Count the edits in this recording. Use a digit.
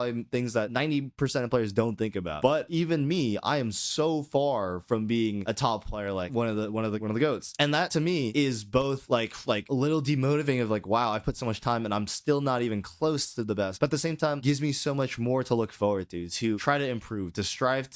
0